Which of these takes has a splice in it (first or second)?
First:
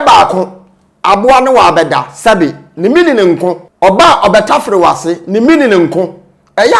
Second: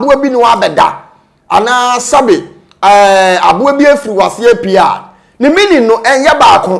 first